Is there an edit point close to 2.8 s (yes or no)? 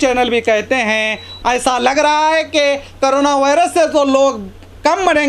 no